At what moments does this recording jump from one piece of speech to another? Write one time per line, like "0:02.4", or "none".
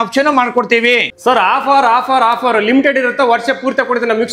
0:01.1